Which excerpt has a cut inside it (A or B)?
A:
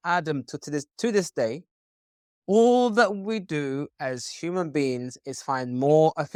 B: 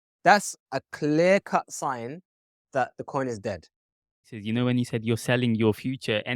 B